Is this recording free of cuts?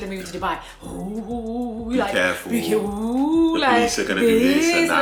yes; 0 cuts

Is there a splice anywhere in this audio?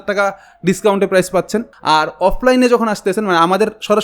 yes; 1 cut; at 1.7 s

